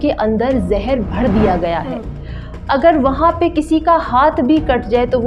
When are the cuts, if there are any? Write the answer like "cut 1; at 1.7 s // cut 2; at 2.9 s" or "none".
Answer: none